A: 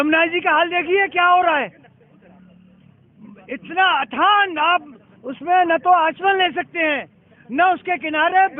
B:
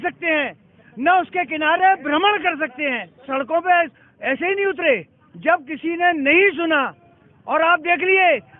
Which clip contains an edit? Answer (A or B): B